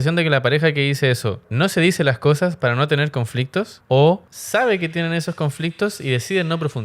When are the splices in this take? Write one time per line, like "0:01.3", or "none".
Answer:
0:01.4
0:03.8
0:04.3